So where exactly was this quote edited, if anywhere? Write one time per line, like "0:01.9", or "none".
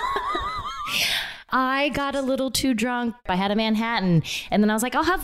0:01.5
0:03.2